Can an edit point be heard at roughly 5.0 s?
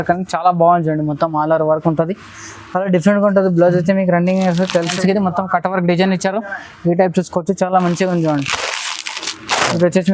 yes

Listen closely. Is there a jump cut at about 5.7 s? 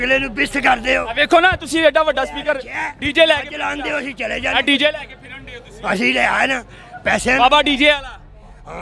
no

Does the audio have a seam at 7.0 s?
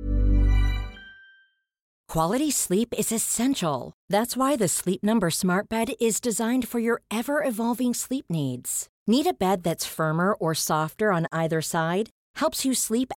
no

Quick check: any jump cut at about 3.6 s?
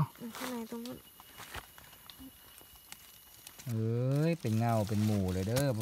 yes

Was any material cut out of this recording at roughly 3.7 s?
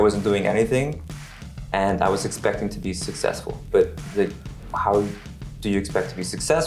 yes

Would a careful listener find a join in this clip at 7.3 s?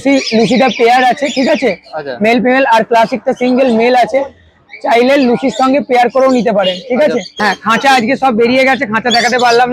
yes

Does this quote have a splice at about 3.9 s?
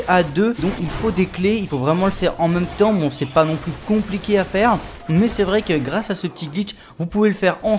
no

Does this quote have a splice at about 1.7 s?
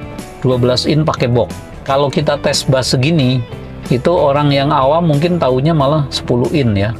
yes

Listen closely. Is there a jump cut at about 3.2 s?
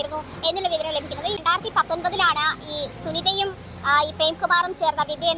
no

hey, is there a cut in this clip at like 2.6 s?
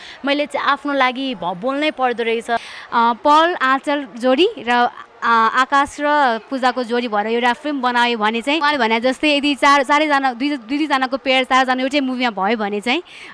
yes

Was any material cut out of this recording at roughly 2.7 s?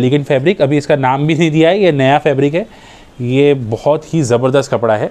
no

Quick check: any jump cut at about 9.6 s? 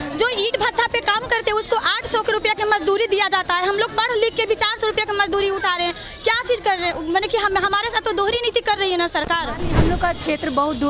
yes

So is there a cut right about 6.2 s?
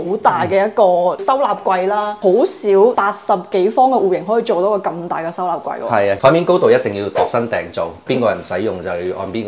yes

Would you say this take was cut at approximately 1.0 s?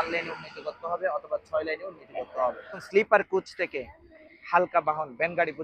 no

